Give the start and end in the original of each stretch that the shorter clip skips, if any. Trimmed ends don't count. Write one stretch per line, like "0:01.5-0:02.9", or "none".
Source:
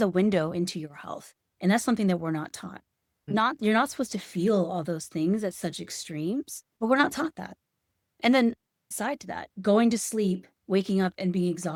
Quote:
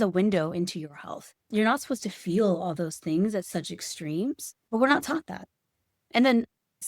0:01.5-0:03.6